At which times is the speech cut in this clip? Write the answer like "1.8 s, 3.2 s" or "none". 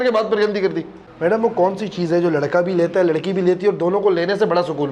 1.0 s